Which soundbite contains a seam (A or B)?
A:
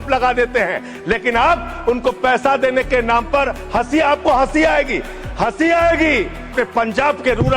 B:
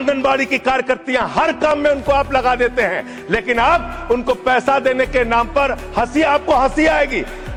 A